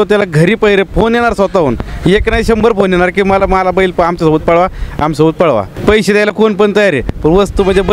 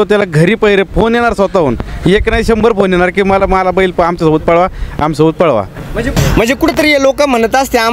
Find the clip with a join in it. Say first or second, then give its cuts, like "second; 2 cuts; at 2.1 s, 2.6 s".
first; 1 cut; at 5.7 s